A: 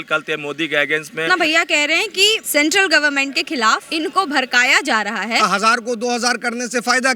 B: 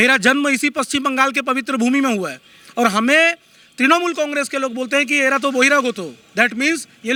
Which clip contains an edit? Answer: A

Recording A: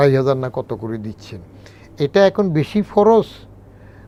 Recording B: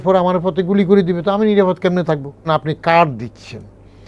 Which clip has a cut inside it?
B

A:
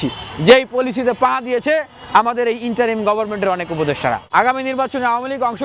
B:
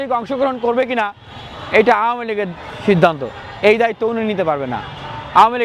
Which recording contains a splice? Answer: A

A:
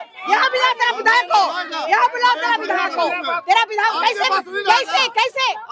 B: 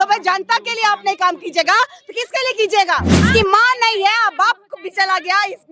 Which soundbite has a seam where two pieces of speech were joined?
B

